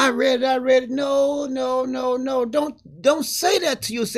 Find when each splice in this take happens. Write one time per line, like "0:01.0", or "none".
none

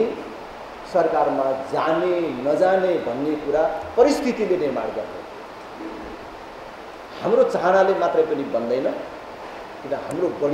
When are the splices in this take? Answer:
none

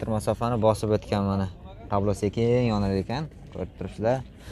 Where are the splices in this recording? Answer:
none

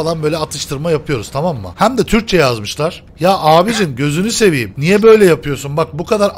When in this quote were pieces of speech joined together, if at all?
0:01.7
0:03.0
0:04.7

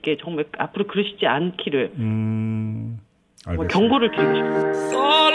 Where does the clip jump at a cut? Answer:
0:04.1

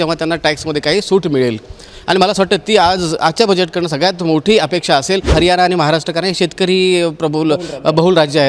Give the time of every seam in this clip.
0:05.3

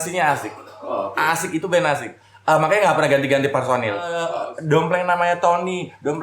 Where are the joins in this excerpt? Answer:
0:04.3

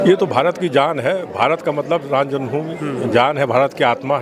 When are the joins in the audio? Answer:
none

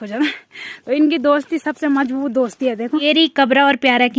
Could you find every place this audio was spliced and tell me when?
0:03.0

